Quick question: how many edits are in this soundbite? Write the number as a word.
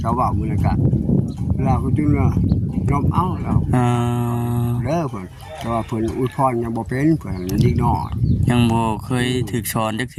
zero